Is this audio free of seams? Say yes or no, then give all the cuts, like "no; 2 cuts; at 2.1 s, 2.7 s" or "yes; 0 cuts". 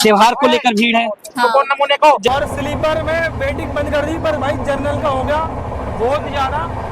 no; 1 cut; at 2.3 s